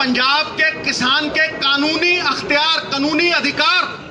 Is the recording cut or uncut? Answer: uncut